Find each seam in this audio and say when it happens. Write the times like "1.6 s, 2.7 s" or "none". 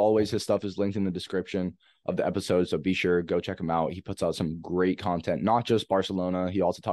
none